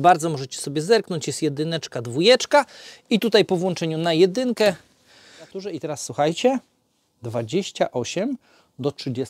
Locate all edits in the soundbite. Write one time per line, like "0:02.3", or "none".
0:05.7